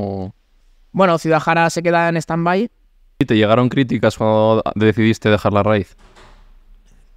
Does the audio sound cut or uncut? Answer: cut